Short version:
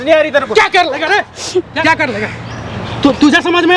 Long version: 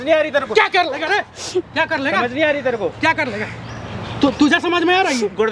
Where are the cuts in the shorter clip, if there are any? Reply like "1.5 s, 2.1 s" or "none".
1.8 s